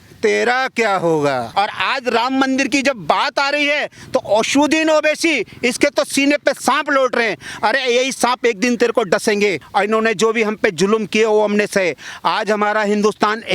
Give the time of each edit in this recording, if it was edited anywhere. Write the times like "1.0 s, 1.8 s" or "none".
1.5 s, 9.6 s